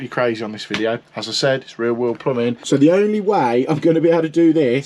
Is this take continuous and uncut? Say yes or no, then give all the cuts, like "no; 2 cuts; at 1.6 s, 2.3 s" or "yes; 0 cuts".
no; 2 cuts; at 1.0 s, 2.6 s